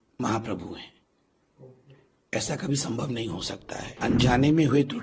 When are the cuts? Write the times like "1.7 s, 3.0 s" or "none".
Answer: 4.0 s